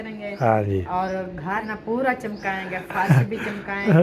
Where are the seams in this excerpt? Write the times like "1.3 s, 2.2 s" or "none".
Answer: 1.7 s